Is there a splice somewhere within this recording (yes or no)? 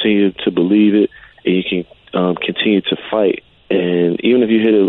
yes